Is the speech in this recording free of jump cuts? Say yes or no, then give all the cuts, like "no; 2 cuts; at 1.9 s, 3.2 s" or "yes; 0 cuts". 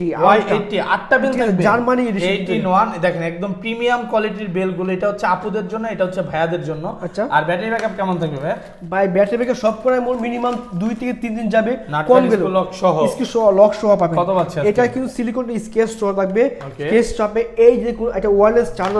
yes; 0 cuts